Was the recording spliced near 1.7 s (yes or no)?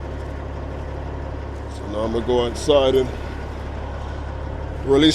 yes